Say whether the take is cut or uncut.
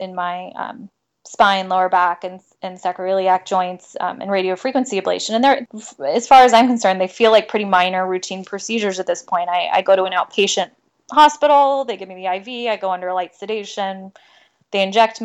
cut